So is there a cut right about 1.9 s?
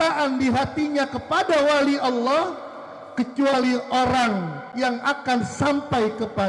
no; 1 cut; at 4.6 s

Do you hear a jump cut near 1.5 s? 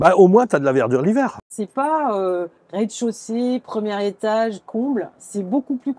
yes; 1 cut; at 1.5 s

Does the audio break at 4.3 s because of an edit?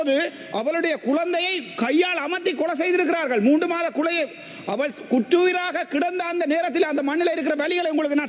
no; 0 cuts

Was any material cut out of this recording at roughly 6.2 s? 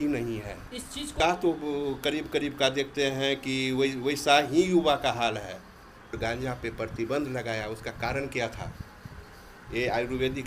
yes; 2 cuts; at 1.1 s, 6.2 s

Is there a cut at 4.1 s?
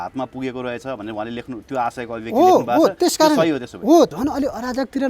yes; 1 cut; at 4.1 s

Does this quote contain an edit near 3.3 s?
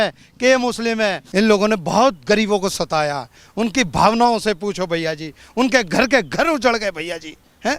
no; 1 cut; at 1.2 s

